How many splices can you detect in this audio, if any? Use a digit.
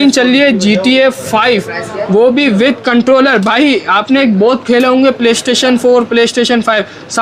0